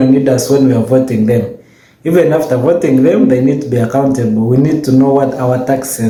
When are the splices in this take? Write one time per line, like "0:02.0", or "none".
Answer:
none